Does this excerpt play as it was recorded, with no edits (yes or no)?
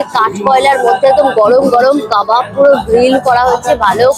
yes